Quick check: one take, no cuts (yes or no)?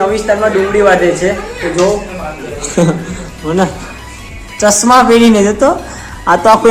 yes